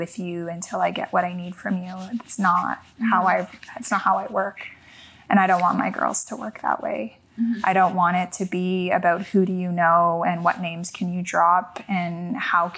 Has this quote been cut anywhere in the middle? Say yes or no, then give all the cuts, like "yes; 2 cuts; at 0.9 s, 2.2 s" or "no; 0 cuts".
no; 0 cuts